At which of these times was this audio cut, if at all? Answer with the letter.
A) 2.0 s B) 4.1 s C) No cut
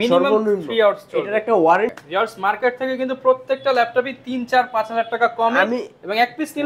A